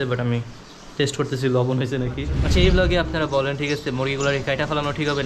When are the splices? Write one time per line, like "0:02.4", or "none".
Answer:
0:02.3

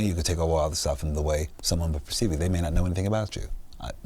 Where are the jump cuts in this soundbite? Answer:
none

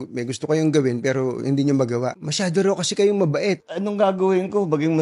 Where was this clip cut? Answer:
0:02.2
0:03.7

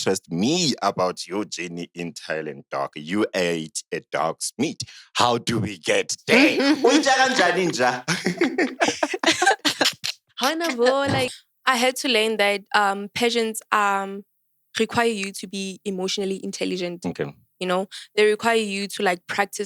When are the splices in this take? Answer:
0:11.3

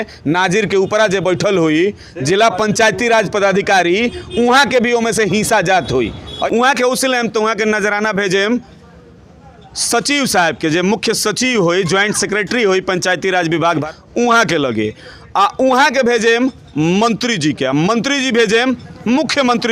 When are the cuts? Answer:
0:06.3
0:13.8

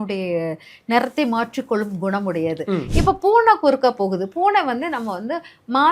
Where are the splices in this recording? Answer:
0:02.9

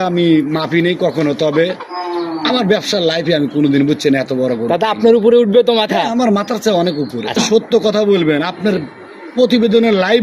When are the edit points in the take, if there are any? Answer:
0:07.3

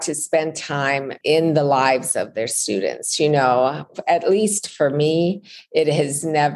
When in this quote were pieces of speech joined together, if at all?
0:01.1

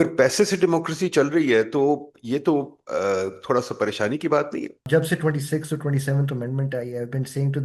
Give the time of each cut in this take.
0:04.8

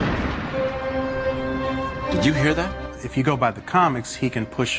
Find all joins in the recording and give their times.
0:02.5

